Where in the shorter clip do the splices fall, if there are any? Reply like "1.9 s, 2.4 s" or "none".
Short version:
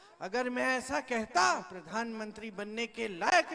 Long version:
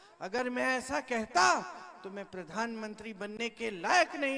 1.8 s